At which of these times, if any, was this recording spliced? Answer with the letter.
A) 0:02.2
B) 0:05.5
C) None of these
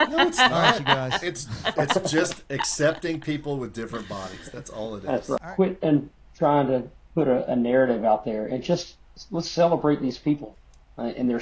B